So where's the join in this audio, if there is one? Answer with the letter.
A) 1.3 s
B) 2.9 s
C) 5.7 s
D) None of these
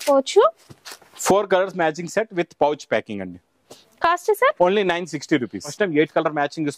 C